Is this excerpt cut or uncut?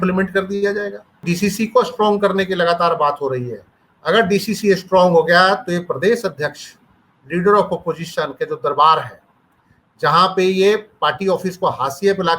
cut